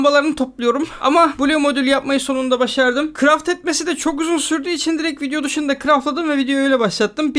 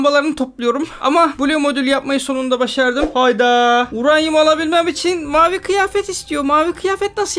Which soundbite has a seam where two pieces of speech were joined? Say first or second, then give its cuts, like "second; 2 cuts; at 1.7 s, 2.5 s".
second; 1 cut; at 3.1 s